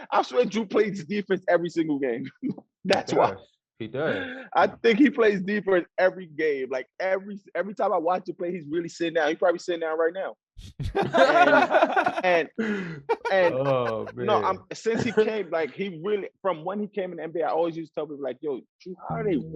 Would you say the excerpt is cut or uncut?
uncut